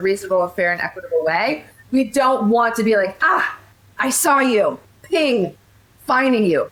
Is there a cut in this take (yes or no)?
no